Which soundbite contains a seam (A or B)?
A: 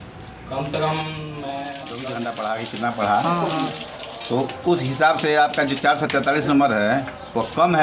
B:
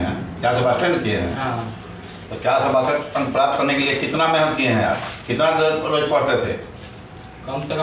A